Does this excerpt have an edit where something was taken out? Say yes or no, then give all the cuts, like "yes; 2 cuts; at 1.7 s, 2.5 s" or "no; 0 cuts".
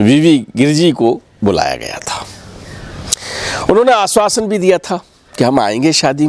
no; 0 cuts